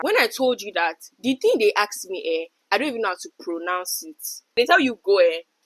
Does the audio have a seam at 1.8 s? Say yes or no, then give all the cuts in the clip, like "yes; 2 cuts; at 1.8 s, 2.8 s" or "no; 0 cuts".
no; 1 cut; at 4.5 s